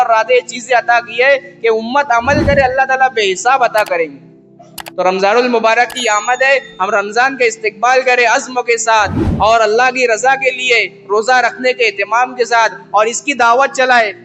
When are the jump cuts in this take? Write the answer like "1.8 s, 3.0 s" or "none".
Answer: none